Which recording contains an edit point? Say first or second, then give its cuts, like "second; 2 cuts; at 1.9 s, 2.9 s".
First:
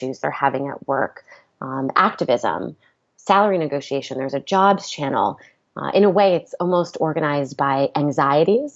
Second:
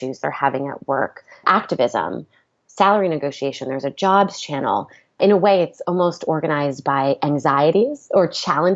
second; 2 cuts; at 1.4 s, 5.0 s